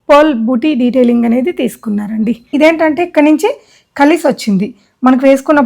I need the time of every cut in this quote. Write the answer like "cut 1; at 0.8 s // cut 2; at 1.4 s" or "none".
cut 1; at 2.5 s